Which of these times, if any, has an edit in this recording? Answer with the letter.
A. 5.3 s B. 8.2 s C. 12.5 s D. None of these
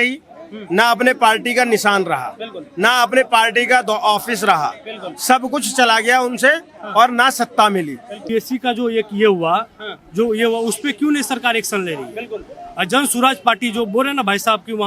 B